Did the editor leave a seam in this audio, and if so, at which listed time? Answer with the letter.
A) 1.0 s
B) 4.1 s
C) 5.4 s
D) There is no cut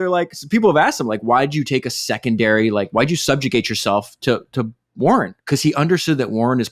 C